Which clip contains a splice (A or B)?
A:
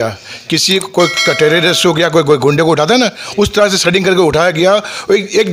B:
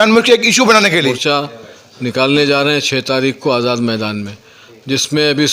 B